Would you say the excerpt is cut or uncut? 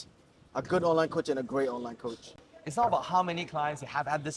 cut